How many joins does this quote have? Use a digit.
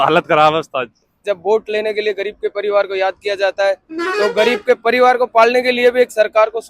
1